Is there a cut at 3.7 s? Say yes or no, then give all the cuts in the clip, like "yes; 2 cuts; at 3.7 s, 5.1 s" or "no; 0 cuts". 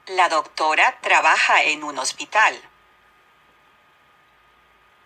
no; 1 cut; at 2.0 s